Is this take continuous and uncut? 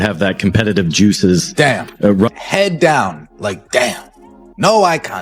yes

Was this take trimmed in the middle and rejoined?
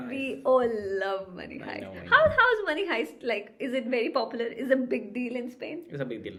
no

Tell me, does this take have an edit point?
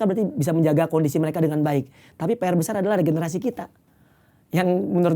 no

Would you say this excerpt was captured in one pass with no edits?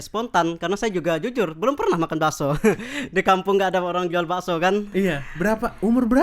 yes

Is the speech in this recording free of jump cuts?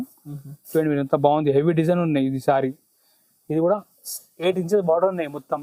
yes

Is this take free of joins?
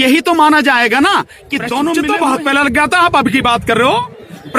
no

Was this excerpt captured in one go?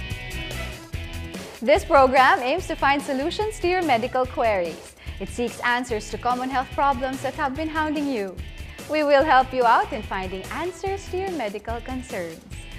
yes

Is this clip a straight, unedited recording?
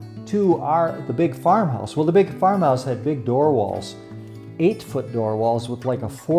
yes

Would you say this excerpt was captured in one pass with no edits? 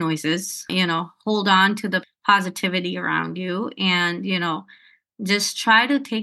no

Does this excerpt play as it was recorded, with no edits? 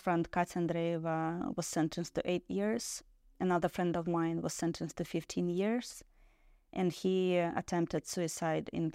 yes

